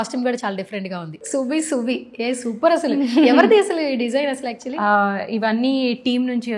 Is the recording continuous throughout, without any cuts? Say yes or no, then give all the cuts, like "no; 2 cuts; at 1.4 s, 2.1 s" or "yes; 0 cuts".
no; 1 cut; at 1.2 s